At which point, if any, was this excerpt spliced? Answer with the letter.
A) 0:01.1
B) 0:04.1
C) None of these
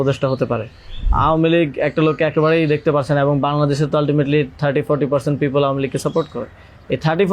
A